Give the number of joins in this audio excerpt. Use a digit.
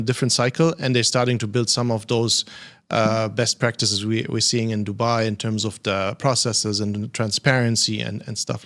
0